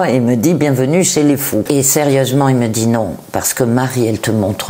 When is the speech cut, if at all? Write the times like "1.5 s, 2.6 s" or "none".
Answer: 1.7 s